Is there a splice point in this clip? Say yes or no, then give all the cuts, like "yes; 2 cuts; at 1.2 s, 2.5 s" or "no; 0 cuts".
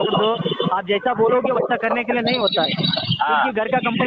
no; 0 cuts